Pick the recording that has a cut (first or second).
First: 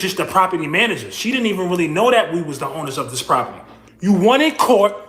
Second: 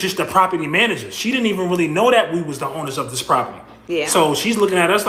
first